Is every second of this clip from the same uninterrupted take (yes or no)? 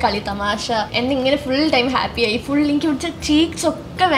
no